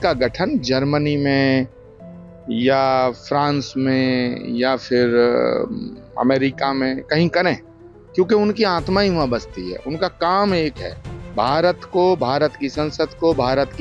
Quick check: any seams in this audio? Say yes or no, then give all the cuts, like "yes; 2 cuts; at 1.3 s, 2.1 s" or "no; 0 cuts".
no; 0 cuts